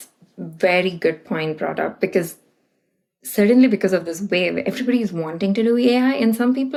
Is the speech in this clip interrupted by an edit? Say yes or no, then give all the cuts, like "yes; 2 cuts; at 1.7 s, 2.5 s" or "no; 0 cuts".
no; 0 cuts